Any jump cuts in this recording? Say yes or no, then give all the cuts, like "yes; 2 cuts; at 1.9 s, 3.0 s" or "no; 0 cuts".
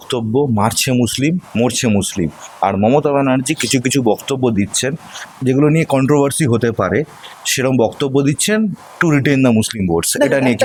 no; 0 cuts